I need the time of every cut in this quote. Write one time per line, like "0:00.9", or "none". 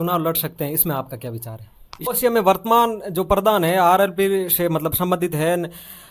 0:02.1

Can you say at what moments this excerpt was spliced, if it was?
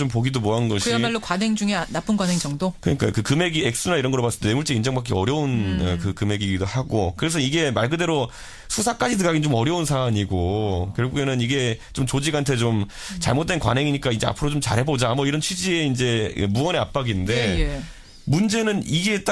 none

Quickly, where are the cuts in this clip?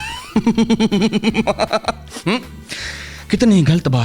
none

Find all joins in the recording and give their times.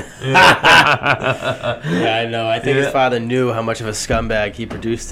none

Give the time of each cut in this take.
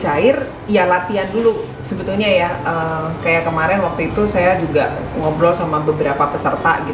none

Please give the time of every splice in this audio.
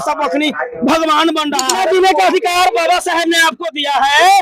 0:01.7

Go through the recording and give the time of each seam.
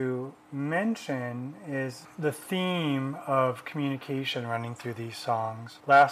none

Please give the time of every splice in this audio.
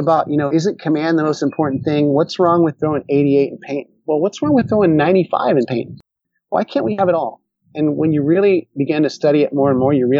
0:06.2

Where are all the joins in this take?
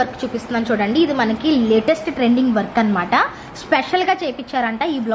none

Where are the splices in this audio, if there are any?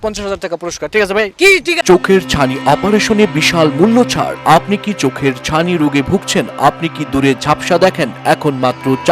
0:01.8

